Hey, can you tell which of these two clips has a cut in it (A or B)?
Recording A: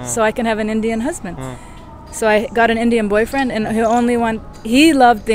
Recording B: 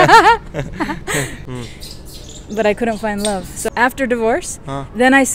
B